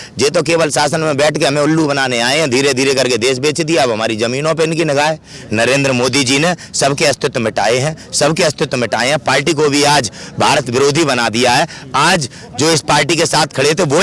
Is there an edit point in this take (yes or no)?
yes